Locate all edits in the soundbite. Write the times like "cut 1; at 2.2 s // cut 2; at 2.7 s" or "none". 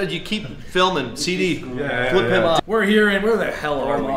cut 1; at 2.6 s